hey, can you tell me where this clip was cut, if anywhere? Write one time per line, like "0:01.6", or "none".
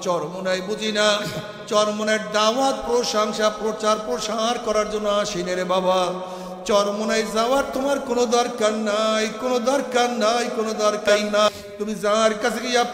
0:11.5

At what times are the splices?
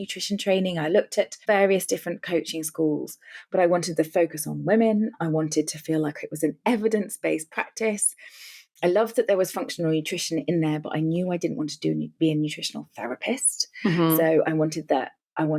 none

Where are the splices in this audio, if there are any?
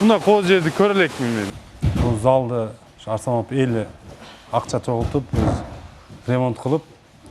0:01.4

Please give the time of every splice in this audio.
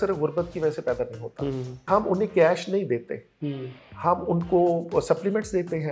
0:01.9

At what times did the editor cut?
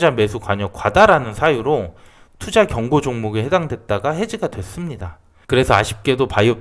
none

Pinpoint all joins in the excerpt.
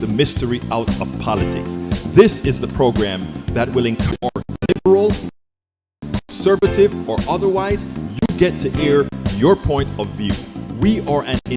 0:04.1

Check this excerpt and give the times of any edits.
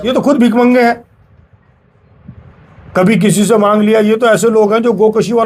none

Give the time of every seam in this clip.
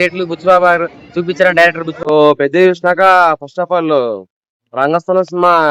0:01.9

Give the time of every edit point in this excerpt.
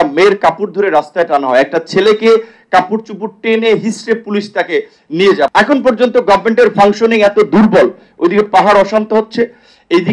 0:05.5

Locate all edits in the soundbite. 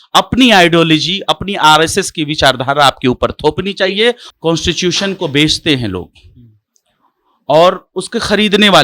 0:04.2

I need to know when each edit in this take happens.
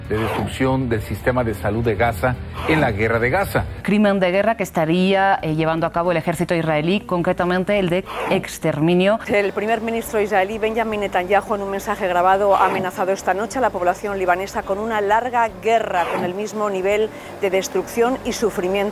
0:03.7
0:09.2

